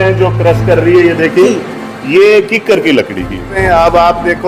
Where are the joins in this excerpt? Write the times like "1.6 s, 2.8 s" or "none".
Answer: 3.6 s